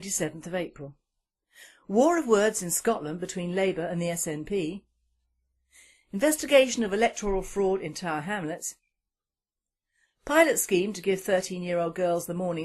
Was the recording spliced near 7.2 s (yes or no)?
no